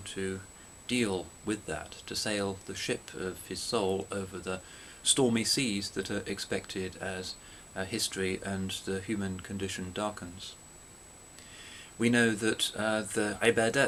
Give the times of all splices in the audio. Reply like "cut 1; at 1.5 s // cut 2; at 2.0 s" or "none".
none